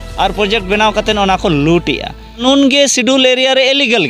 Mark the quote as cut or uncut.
cut